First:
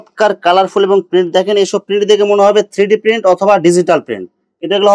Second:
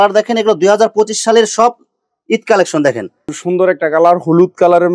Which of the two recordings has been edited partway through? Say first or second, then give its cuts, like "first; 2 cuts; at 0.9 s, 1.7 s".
second; 1 cut; at 3.2 s